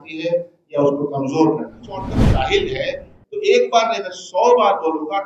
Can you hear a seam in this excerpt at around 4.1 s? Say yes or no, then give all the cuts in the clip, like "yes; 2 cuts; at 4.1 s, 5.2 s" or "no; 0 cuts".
no; 1 cut; at 2.2 s